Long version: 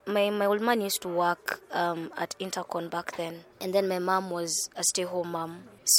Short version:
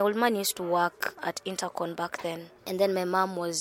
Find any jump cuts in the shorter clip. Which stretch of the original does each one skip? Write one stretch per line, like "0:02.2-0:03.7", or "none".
0:01.6-0:02.1